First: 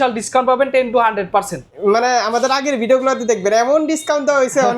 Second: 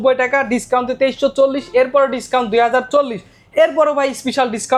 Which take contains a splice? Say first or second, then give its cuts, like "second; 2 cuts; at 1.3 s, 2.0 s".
first; 1 cut; at 1.6 s